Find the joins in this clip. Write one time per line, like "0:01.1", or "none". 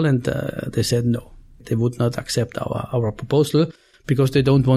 0:01.6